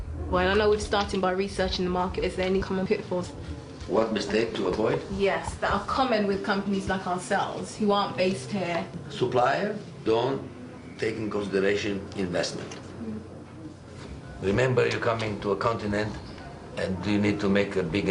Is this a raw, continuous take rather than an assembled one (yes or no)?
no